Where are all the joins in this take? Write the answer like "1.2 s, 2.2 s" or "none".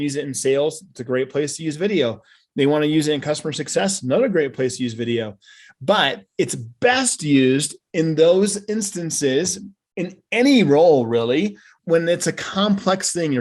11.7 s